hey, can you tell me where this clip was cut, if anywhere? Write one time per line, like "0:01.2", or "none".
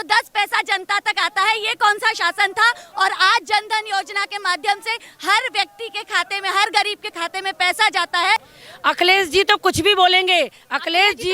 0:08.6